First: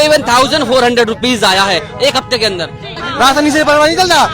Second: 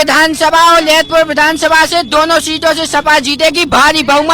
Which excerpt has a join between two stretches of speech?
first; 1 cut; at 3.0 s

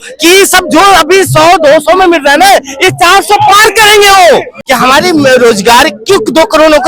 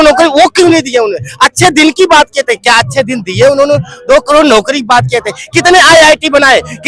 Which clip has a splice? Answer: first; 1 cut; at 4.6 s

